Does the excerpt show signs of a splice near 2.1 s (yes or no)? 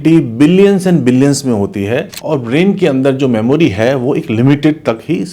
yes